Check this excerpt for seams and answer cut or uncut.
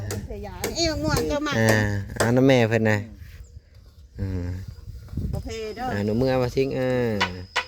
cut